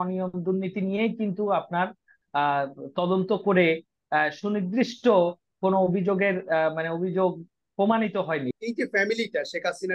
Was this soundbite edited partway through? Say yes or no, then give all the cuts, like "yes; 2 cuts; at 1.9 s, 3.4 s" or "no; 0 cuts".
yes; 1 cut; at 8.5 s